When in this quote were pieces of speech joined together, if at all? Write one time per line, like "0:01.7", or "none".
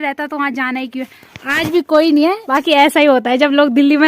0:02.4